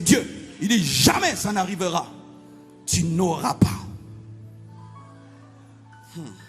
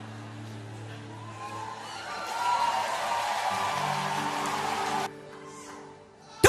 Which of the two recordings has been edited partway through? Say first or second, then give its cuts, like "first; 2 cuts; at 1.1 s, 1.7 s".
second; 1 cut; at 5.1 s